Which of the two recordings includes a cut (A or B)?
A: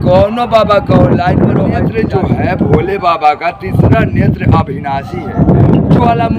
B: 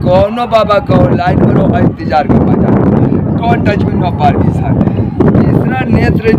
A